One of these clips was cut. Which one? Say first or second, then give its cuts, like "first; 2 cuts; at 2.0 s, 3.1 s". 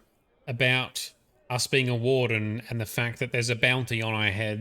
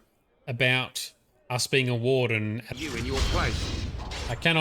second; 1 cut; at 2.7 s